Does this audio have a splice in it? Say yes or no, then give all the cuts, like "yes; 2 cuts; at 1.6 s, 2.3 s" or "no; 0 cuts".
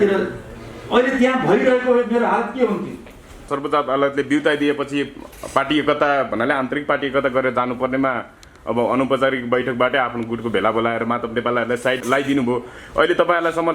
yes; 1 cut; at 3.5 s